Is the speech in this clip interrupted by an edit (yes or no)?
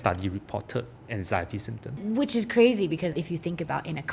yes